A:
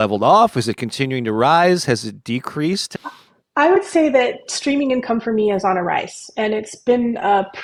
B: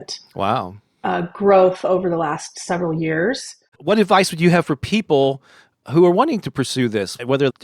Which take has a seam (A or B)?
B